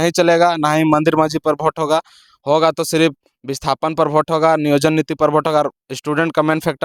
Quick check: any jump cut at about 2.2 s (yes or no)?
no